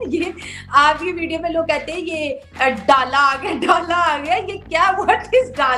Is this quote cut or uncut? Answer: uncut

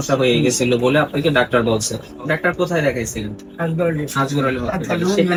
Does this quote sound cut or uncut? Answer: uncut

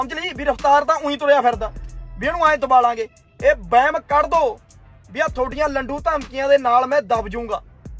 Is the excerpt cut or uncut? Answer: uncut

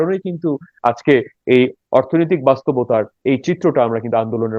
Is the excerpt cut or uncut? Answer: cut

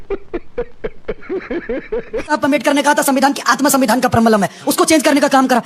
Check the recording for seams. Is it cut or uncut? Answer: cut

